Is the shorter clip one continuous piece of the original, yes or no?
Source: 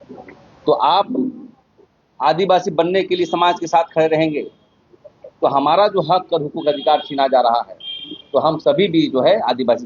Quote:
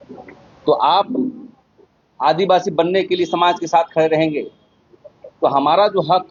yes